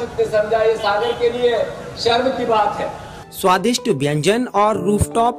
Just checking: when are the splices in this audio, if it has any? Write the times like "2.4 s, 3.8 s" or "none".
3.2 s